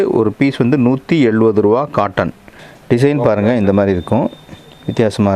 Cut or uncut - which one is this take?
cut